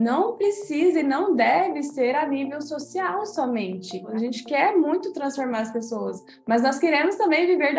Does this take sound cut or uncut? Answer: cut